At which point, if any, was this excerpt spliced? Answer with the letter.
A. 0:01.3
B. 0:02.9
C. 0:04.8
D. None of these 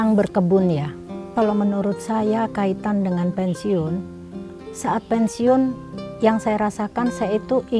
A